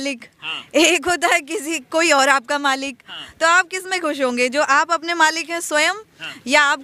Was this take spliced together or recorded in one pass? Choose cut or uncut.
uncut